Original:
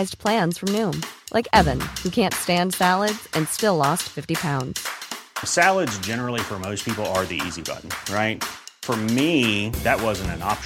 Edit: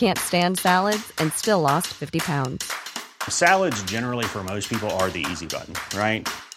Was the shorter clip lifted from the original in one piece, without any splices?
yes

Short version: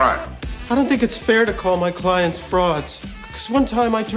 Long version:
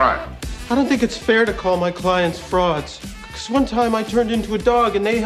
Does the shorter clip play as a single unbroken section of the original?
yes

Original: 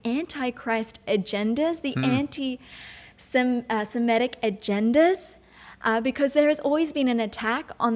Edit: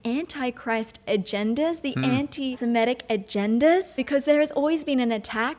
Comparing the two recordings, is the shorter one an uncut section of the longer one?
no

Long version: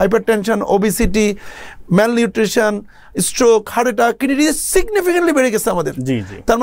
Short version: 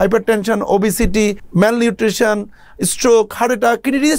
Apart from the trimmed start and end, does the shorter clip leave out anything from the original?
yes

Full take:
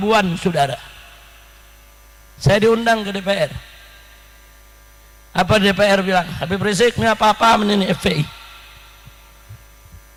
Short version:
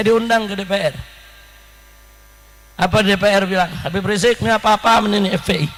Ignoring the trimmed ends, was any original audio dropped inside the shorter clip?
no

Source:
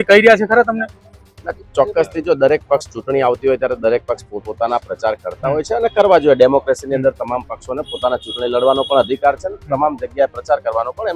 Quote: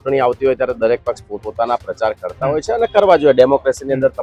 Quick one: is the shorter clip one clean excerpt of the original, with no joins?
yes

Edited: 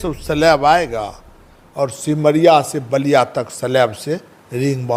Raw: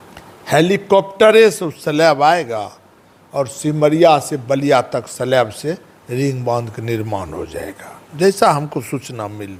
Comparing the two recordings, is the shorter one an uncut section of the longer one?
yes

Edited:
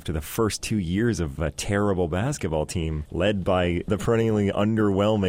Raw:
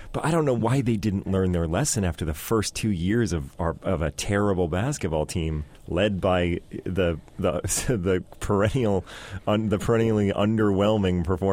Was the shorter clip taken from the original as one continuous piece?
no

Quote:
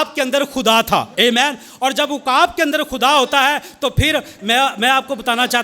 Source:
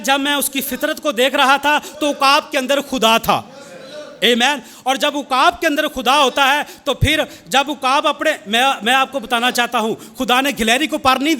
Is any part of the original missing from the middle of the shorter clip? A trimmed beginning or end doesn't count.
yes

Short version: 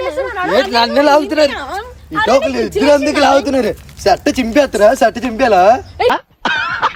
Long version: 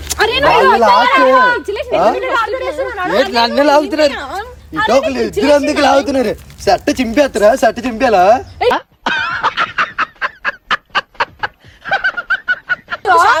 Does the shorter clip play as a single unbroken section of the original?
yes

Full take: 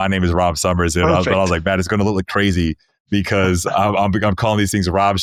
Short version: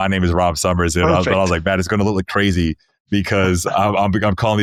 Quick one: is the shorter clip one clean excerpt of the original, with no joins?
yes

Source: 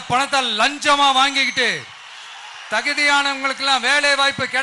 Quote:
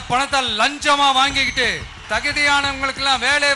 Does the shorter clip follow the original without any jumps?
no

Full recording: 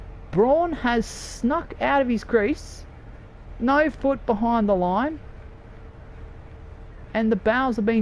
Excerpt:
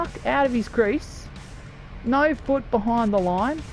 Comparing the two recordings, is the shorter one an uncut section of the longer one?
yes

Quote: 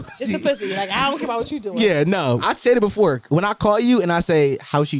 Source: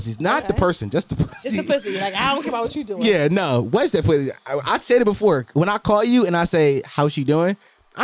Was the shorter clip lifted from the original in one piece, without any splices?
no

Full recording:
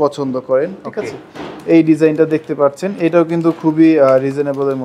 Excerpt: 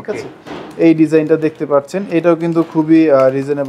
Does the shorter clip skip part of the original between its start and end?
no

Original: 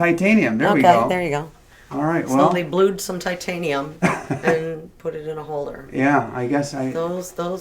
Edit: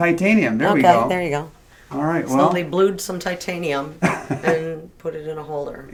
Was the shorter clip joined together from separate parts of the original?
no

